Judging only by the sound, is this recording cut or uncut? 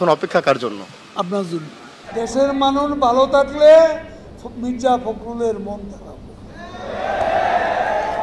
uncut